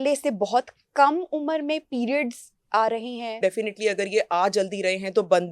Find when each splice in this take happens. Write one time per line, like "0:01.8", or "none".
0:03.4

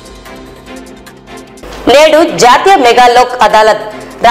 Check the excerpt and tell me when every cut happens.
0:01.3

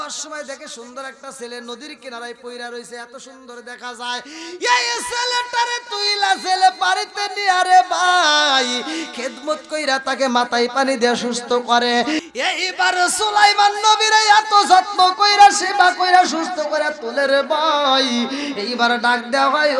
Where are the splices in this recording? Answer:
0:12.2

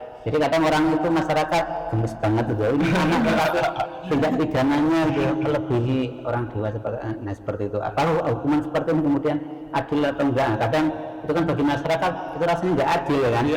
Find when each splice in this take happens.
none

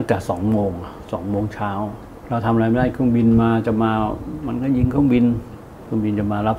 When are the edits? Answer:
0:02.1
0:05.6

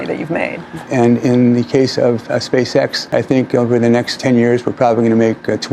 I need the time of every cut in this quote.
0:00.9
0:03.0
0:04.1

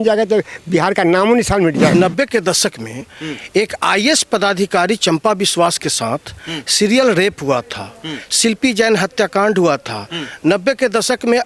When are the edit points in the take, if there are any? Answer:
0:01.9

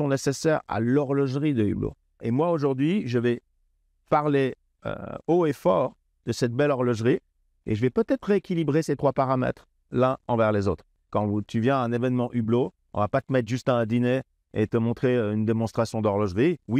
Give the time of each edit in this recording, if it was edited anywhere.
0:02.2
0:10.9

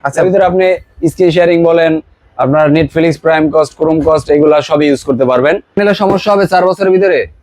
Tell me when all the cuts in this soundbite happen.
0:05.8

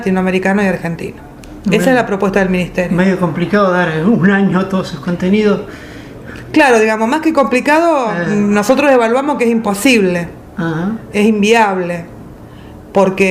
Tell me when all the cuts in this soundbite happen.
0:01.7

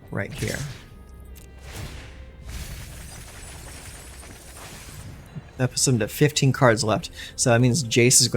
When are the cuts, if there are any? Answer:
none

